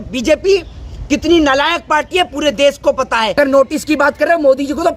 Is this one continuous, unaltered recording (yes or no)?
no